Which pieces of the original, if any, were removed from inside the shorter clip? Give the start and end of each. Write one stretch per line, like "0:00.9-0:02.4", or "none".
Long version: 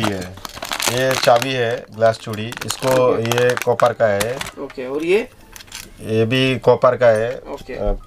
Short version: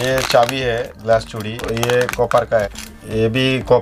0:02.6-0:03.2
0:04.2-0:05.7